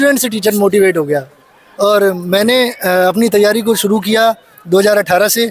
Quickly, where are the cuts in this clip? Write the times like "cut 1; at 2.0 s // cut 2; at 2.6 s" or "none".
none